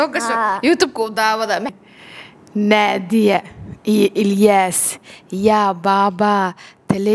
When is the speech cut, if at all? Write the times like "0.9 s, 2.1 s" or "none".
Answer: 1.7 s